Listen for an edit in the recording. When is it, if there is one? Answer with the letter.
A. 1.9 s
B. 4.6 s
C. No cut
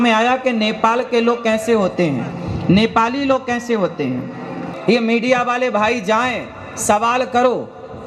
B